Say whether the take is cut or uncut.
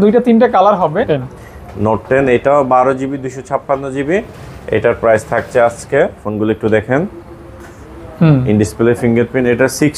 cut